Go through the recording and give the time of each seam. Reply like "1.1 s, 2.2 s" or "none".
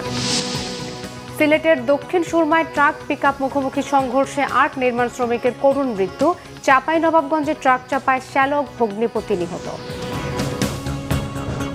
10.5 s

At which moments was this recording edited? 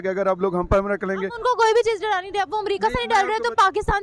none

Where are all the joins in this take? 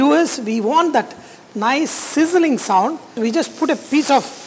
3.2 s

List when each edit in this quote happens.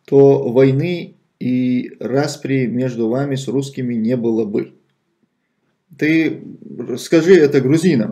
7.0 s

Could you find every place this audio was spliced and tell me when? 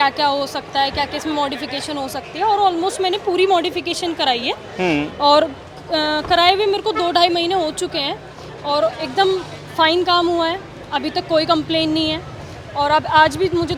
none

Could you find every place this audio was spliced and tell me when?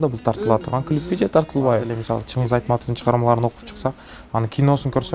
2.0 s

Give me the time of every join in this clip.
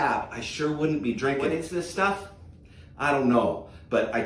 1.6 s

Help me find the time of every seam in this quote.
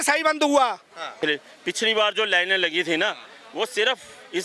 1.0 s

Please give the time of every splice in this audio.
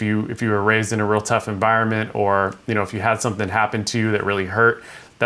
none

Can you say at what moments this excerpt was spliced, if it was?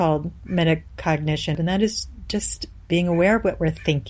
1.6 s

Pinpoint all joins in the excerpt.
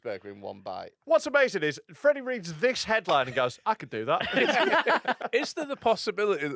0.9 s, 5.2 s

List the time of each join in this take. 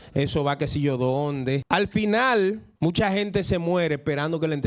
1.6 s, 2.7 s

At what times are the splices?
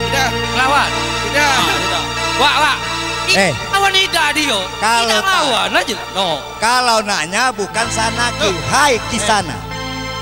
none

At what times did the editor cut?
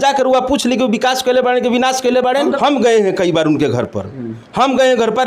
2.4 s

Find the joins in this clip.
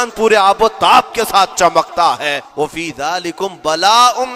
2.4 s

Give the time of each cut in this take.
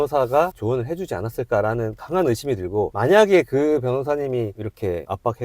2.9 s

